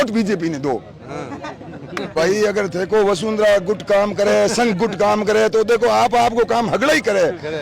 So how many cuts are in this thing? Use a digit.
1